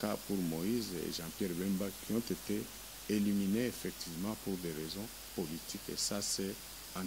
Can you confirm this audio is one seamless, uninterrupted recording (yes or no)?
yes